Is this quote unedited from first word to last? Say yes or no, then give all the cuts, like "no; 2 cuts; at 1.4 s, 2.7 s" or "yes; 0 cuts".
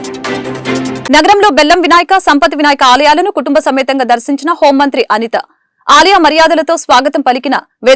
no; 1 cut; at 1.0 s